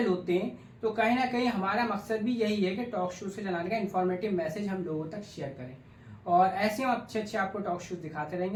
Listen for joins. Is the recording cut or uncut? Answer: uncut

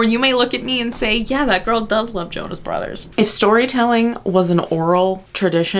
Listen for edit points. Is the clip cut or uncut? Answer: cut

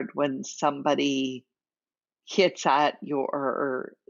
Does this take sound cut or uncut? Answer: uncut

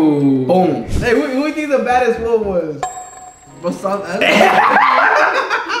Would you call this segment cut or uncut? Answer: cut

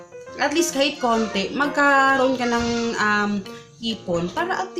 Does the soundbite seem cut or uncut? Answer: uncut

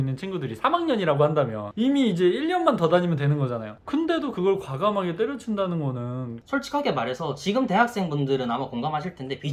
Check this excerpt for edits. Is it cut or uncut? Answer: uncut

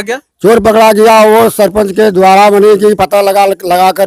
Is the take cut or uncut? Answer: uncut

